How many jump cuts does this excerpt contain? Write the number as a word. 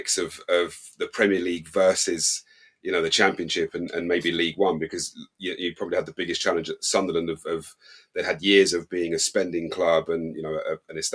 zero